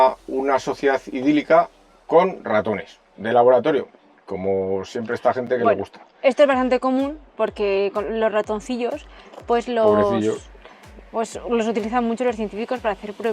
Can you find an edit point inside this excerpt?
no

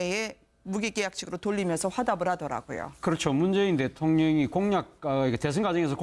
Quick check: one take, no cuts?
no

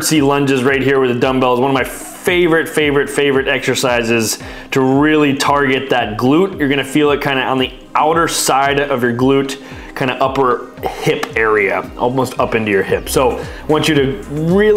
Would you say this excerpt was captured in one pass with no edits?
yes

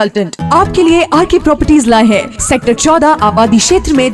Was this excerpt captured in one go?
yes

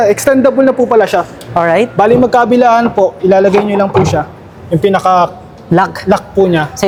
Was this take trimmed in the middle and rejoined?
no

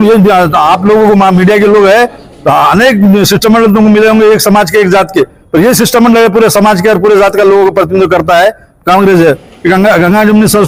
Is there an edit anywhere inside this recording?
no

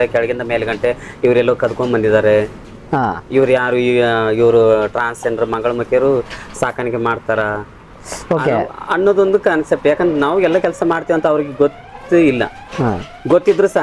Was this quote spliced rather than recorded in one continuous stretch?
no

